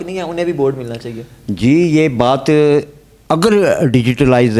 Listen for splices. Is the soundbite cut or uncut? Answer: uncut